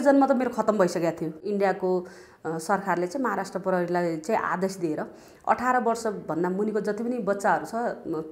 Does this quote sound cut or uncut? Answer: cut